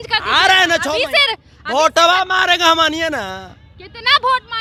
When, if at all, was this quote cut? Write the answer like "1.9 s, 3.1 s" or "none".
none

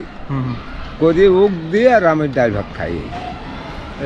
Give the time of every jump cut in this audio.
none

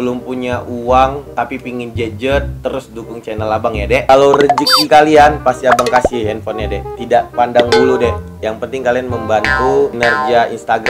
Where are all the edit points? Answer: 1.2 s

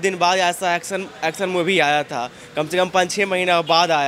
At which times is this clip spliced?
none

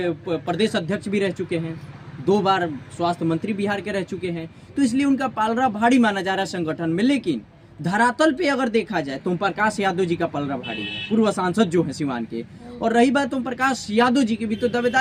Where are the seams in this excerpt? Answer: none

